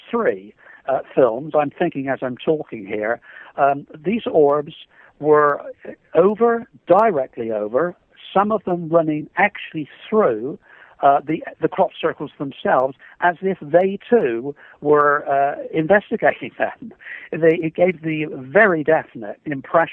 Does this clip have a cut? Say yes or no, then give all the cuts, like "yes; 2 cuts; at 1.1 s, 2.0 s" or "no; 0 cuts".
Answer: yes; 1 cut; at 7.5 s